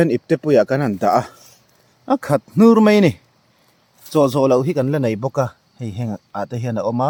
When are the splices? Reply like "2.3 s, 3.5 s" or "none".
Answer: none